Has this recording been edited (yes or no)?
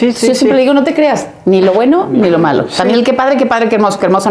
no